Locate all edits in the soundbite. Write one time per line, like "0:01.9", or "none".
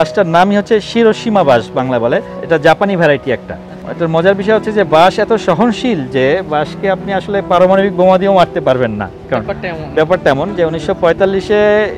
0:02.3
0:03.8